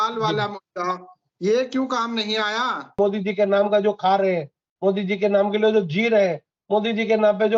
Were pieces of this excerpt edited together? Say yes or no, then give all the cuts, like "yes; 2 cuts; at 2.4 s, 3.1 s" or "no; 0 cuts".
yes; 1 cut; at 3.0 s